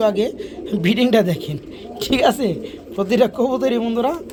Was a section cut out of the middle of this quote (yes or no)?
no